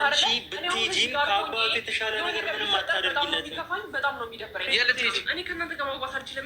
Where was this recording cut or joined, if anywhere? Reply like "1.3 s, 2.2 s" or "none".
4.7 s